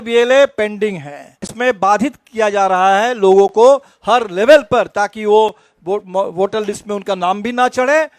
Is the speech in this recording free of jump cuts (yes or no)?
no